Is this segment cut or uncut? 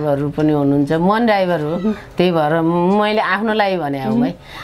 uncut